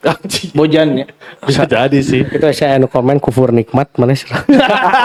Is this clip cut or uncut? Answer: uncut